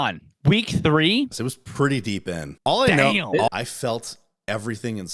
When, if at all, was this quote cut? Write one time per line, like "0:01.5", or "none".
0:01.3
0:02.5
0:03.5